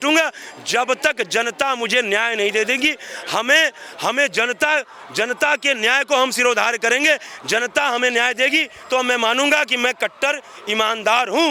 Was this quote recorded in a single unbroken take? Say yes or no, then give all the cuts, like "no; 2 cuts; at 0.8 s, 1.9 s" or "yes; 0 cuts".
yes; 0 cuts